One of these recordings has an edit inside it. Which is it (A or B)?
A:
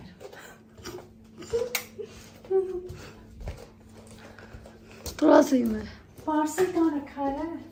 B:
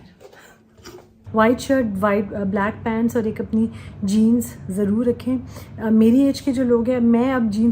B